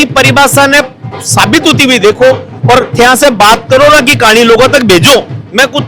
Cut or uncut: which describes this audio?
uncut